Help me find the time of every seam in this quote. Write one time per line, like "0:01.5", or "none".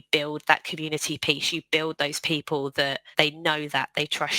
0:03.0